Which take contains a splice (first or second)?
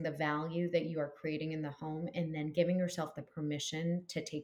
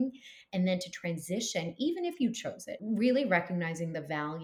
second